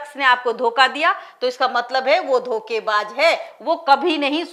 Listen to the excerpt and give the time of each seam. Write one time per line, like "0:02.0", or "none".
none